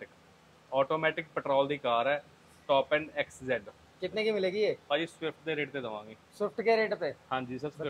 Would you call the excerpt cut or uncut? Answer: uncut